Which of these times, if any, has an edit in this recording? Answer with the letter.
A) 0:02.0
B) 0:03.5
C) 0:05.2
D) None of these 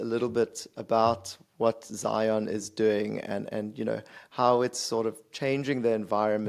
D